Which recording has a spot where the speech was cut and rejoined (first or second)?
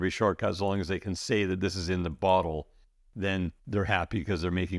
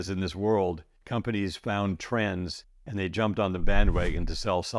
second